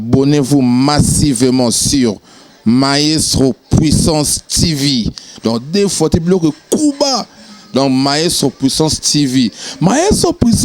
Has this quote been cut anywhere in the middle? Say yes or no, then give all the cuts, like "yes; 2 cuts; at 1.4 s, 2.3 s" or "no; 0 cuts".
no; 0 cuts